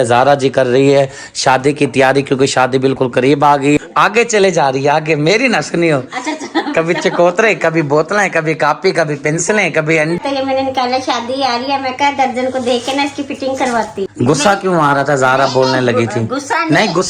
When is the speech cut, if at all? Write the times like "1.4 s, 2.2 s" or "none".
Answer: 3.8 s, 10.2 s, 14.0 s